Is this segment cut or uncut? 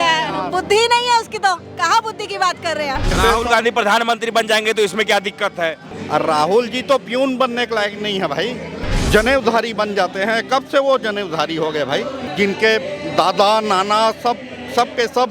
cut